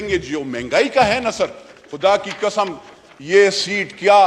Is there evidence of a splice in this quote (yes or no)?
no